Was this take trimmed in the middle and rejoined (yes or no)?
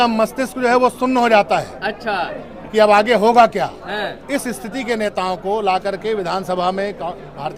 no